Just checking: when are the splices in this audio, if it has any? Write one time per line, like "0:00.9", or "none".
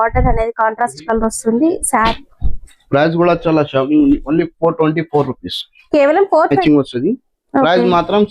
0:02.1
0:06.6